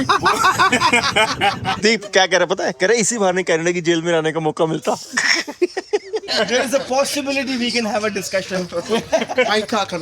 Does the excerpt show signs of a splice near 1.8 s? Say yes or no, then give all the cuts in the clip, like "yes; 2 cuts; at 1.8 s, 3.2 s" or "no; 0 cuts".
yes; 2 cuts; at 1.8 s, 6.3 s